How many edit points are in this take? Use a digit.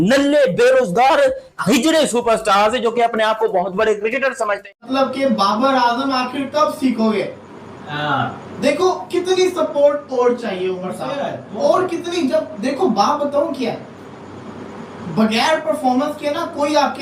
1